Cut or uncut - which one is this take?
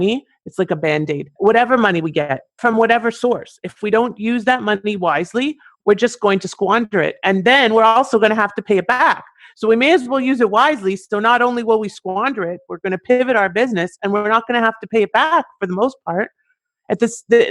cut